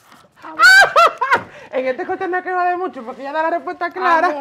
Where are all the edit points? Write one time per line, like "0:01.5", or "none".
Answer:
none